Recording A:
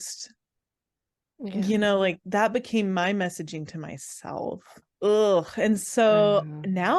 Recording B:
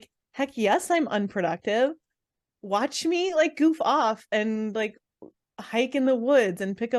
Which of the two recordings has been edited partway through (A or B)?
A